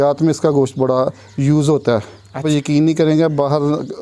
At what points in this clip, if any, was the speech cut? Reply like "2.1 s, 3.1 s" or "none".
2.4 s

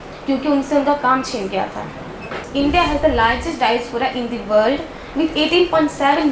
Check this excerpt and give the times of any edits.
2.5 s

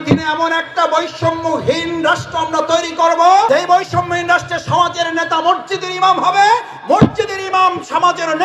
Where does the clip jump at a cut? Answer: 3.5 s

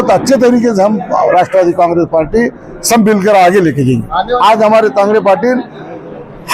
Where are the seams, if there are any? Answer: 4.4 s

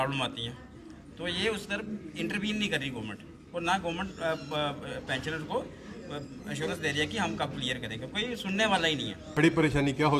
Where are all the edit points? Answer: 9.2 s

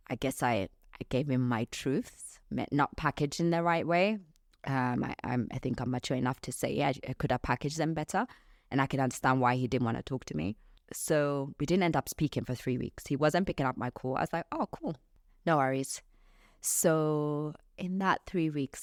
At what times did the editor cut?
none

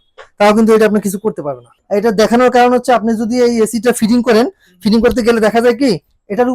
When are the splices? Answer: 1.7 s

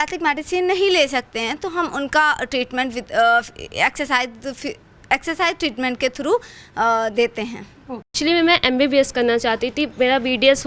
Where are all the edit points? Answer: 8.1 s

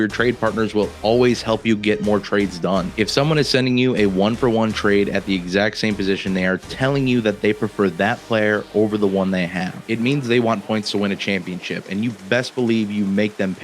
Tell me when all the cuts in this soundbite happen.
2.9 s, 9.8 s

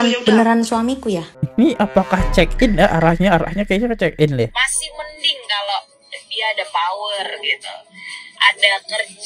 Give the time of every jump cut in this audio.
1.4 s, 4.5 s

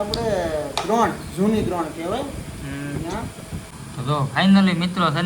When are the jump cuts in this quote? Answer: 3.7 s

